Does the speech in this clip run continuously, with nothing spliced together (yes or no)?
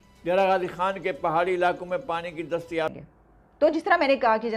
no